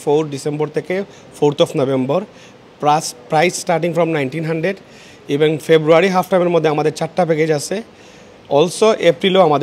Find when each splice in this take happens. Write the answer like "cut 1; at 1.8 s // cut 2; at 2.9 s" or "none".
none